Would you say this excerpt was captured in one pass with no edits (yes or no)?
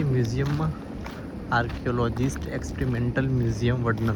yes